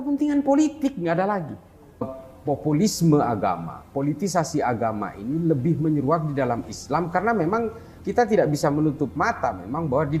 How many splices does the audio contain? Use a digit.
1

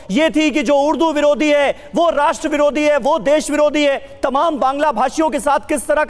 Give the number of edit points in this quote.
0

